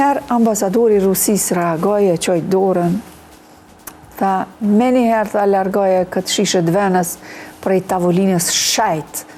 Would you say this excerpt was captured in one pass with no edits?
yes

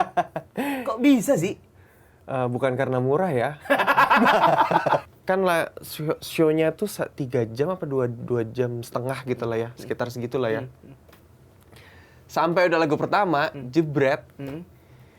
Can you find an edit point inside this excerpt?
yes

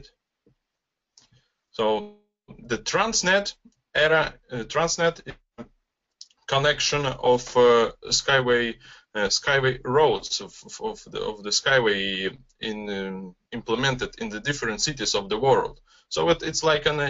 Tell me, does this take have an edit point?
no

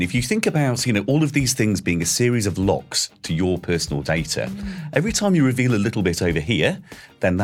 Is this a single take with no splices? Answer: yes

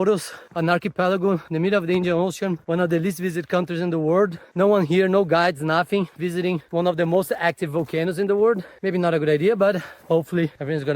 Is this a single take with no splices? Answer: yes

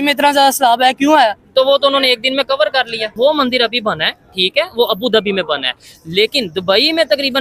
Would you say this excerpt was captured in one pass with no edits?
no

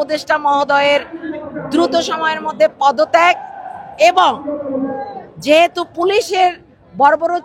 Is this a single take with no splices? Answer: yes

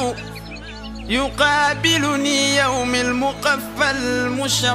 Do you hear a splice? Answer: no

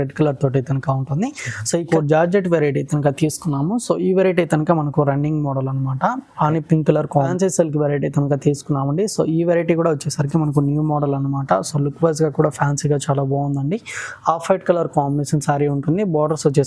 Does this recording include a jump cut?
yes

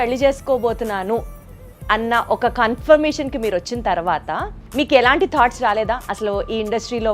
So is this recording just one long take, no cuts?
no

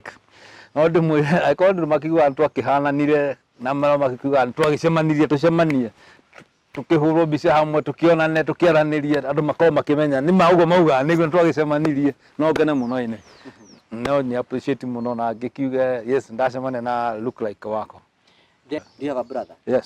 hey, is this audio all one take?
no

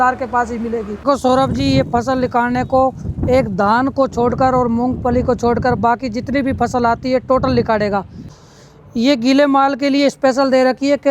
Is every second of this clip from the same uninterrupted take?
no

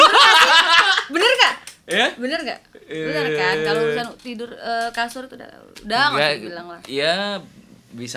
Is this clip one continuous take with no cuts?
yes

